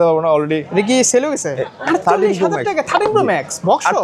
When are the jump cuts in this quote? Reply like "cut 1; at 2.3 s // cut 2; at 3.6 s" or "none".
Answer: cut 1; at 1.7 s